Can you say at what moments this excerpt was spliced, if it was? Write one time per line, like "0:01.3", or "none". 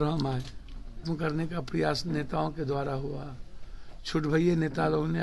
0:01.0